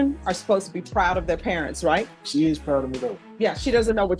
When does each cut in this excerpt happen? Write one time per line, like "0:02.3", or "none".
0:02.2
0:03.2

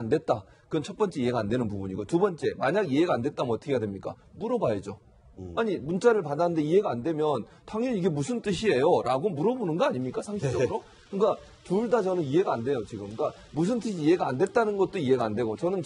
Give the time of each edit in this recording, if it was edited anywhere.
0:11.2

